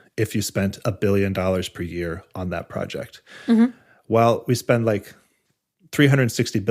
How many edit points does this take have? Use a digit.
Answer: 0